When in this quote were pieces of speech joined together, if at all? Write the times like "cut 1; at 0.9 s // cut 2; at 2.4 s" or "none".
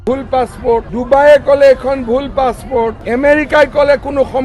cut 1; at 0.9 s // cut 2; at 3.0 s